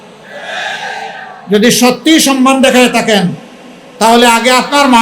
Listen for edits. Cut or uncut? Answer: uncut